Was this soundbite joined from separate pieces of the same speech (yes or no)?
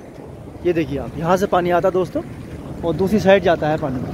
no